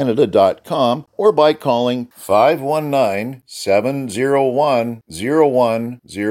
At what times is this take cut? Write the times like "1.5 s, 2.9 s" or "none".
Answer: 1.1 s